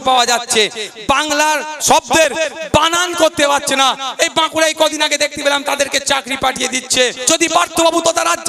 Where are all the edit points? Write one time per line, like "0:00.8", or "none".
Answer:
0:01.8
0:07.2

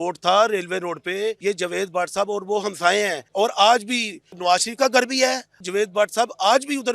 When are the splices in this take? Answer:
0:01.4
0:03.2
0:04.3
0:05.6

